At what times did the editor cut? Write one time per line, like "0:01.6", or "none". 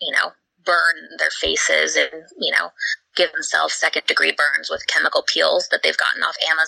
none

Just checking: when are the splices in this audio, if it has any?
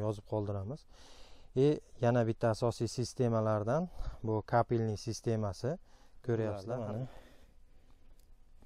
0:06.7

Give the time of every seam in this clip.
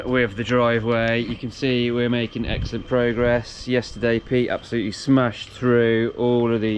none

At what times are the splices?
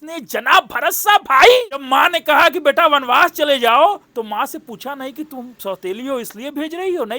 0:01.8

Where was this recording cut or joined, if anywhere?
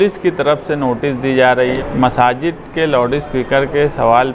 0:01.8

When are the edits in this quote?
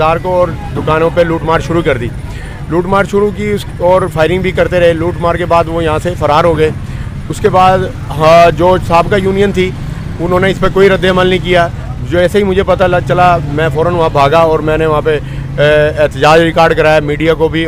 none

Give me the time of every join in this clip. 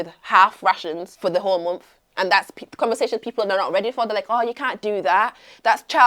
0:01.1

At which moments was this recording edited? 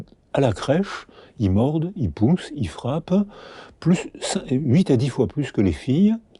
none

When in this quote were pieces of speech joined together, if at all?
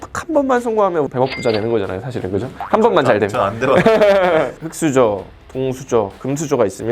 0:04.6

